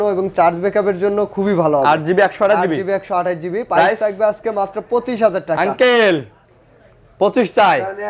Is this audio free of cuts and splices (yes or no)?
yes